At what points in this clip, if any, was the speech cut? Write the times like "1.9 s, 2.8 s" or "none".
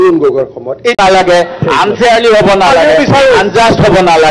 0.9 s